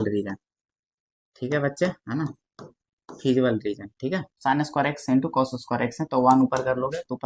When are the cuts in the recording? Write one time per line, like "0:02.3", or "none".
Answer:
0:04.3